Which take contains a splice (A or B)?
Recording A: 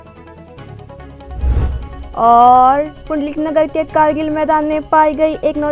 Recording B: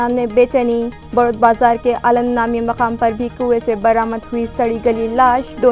A